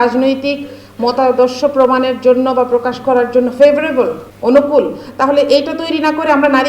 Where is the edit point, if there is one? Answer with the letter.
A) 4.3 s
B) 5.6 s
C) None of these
A